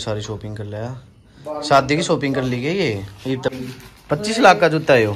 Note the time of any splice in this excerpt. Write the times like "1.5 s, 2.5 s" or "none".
3.5 s